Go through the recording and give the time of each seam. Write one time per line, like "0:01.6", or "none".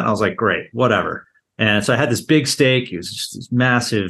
0:01.2